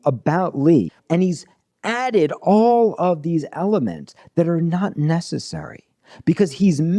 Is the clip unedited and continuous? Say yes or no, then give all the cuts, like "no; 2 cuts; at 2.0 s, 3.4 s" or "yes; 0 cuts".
no; 1 cut; at 1.0 s